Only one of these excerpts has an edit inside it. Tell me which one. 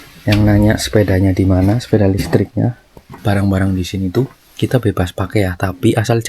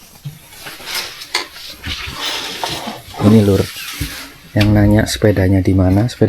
first; 1 cut; at 3.2 s

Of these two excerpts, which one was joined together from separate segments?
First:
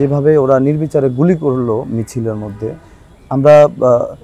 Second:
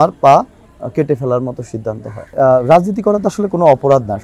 second; 1 cut; at 2.3 s

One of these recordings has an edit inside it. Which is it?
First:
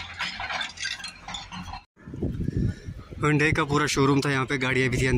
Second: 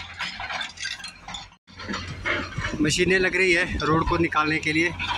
first; 1 cut; at 1.7 s

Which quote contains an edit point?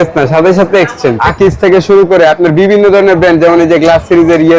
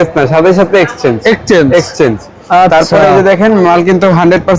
first; 1 cut; at 1.2 s

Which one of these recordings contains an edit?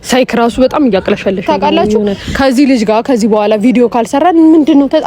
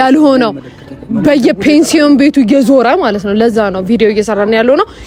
first; 1 cut; at 2.2 s

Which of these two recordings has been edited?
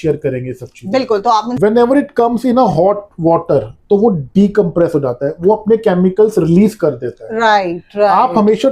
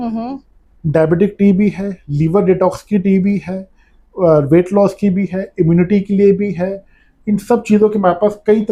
first; 1 cut; at 1.6 s

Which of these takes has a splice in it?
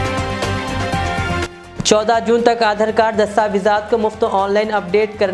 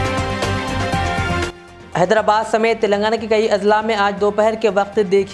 first; 1 cut; at 1.4 s

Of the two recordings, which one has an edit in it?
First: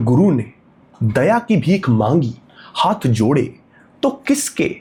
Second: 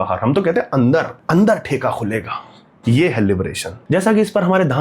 second; 2 cuts; at 1.2 s, 3.7 s

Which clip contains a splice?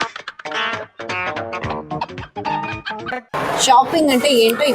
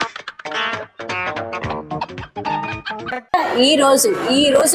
first; 1 cut; at 3.3 s

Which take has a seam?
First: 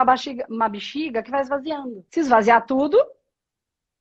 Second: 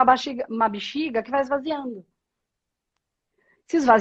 first; 1 cut; at 2.0 s

